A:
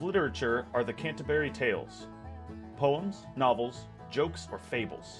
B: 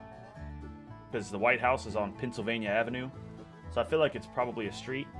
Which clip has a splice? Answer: B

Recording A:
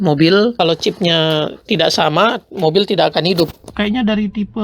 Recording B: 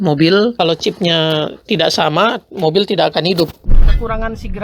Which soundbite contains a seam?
B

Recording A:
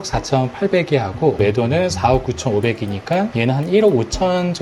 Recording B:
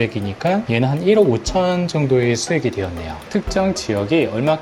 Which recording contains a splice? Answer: B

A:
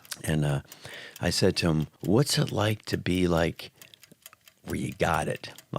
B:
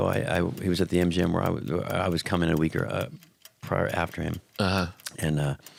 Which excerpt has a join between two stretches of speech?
A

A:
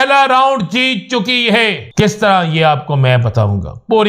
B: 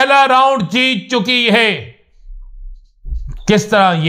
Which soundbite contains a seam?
A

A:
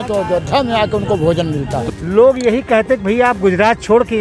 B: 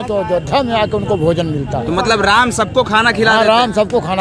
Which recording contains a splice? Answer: A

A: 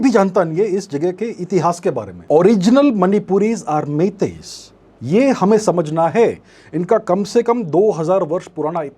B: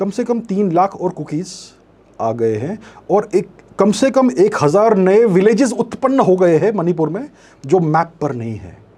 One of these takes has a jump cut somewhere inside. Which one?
A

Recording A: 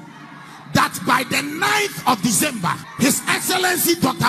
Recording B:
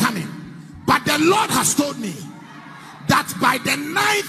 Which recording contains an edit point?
A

